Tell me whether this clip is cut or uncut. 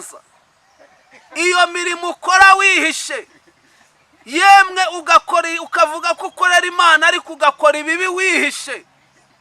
uncut